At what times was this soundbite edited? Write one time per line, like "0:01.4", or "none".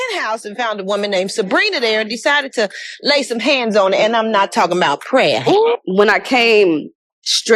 0:05.8